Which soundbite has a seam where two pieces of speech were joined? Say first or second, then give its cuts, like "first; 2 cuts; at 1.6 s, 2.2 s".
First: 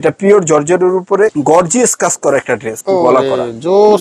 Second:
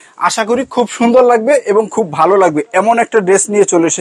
first; 2 cuts; at 1.3 s, 2.7 s